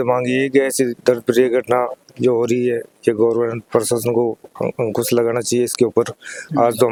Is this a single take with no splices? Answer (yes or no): yes